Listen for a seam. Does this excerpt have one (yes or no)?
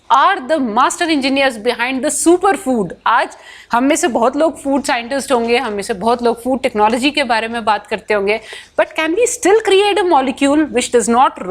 no